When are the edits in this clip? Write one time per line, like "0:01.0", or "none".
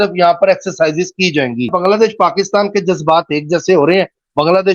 0:01.7